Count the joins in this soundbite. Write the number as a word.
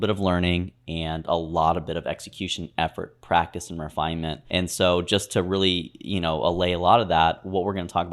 one